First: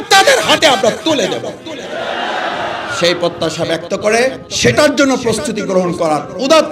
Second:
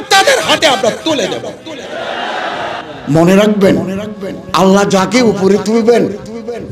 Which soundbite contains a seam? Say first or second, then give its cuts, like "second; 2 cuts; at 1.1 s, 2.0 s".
second; 1 cut; at 2.8 s